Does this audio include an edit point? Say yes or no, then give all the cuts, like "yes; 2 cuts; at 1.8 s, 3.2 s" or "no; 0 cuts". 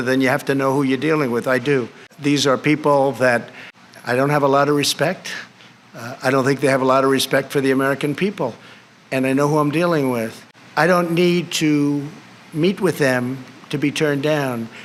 no; 0 cuts